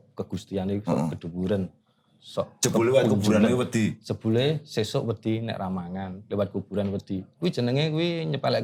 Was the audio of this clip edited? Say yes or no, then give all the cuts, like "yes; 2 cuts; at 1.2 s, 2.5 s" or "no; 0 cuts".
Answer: no; 0 cuts